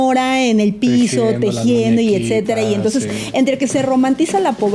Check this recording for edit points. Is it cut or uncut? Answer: uncut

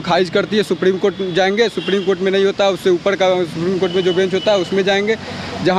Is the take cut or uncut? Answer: uncut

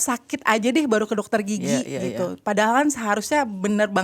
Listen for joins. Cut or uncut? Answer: uncut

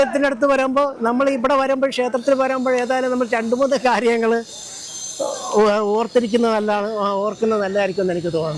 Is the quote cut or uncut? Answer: uncut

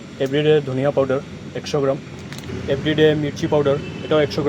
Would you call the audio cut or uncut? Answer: cut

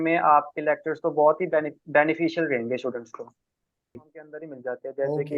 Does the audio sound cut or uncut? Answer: cut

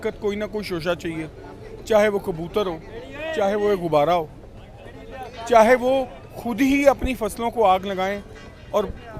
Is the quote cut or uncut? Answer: uncut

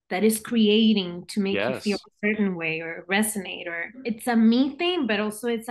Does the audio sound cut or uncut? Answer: cut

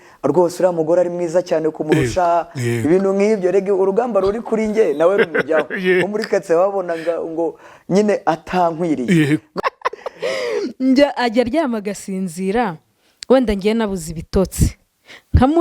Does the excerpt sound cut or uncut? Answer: cut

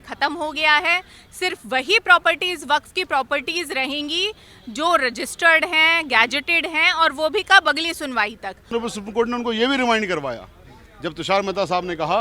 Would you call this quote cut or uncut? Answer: cut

